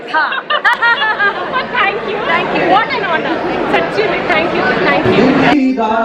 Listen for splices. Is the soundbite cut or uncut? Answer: cut